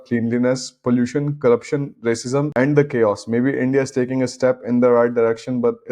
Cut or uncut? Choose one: cut